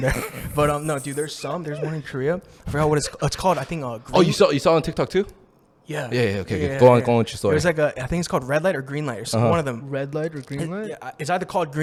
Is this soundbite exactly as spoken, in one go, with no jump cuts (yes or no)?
yes